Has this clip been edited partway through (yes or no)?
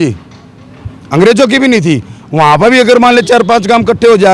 no